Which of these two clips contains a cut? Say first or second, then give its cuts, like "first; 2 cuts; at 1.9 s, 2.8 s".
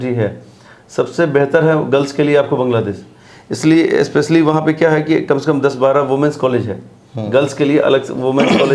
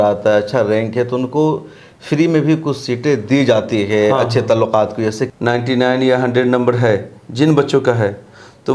second; 1 cut; at 5.2 s